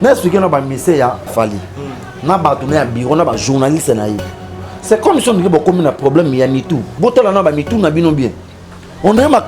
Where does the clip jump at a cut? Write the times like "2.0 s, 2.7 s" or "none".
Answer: 1.3 s, 6.9 s